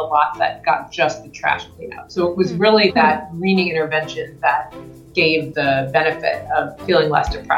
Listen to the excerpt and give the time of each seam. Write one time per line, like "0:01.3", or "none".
0:05.5
0:06.8